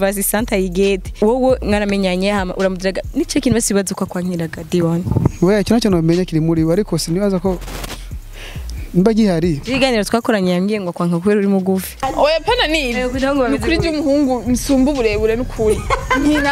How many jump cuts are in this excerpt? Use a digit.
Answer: 2